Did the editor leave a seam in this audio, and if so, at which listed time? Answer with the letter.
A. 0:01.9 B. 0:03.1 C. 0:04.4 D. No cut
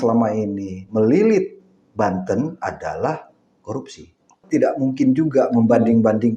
C